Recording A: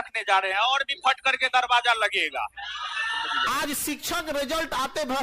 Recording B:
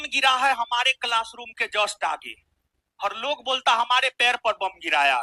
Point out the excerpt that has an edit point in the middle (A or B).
A